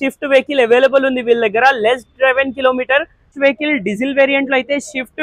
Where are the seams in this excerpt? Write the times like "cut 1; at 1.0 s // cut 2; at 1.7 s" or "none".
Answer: cut 1; at 3.0 s